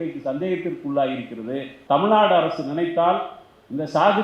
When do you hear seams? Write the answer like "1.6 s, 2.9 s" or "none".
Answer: 1.7 s